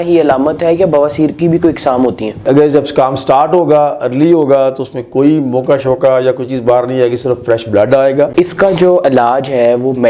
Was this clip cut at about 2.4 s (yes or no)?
yes